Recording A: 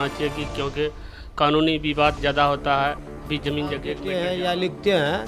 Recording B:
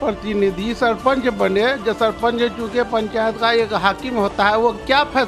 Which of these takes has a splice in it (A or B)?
A